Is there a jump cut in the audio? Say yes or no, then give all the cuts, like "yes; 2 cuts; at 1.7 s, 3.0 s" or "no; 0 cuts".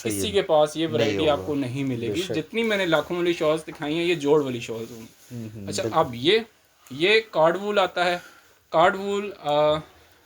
no; 0 cuts